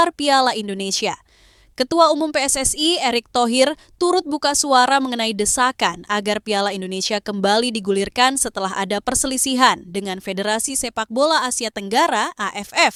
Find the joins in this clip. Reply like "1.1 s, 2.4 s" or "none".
none